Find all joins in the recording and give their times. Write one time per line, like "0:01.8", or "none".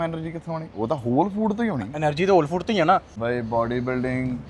0:03.1

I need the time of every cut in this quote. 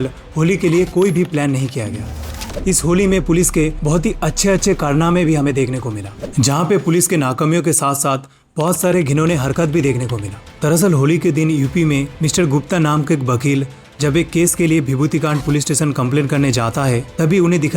0:02.3
0:03.8

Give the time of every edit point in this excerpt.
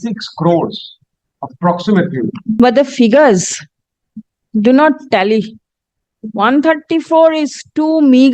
0:02.6

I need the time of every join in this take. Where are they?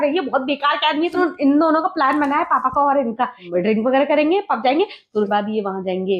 0:01.2
0:03.5
0:05.3

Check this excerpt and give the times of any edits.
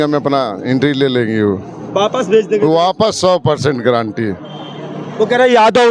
none

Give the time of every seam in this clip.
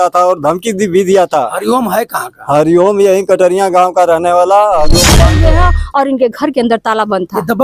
0:05.3

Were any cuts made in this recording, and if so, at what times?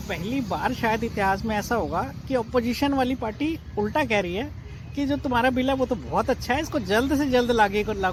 none

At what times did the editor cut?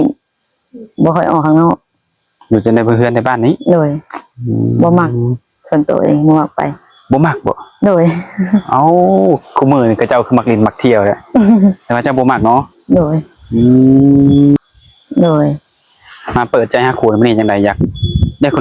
0:14.6

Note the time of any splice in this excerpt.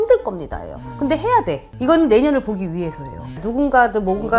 0:01.7
0:03.4

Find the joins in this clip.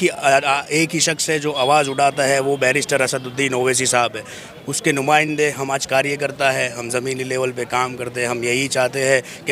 none

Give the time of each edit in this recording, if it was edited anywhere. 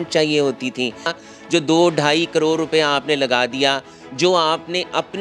0:01.2

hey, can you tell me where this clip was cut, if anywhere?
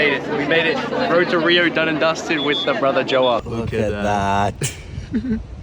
0:03.4

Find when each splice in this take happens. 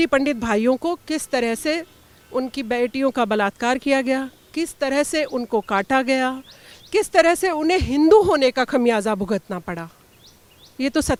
none

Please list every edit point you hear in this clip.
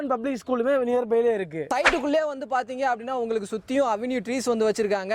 0:01.7

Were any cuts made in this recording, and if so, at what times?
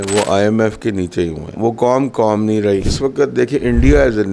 0:01.6
0:02.9

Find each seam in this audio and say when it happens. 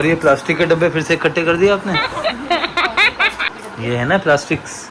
none

